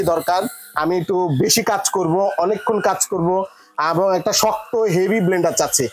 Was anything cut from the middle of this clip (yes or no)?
no